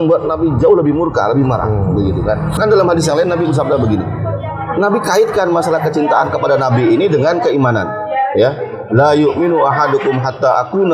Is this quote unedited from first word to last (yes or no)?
no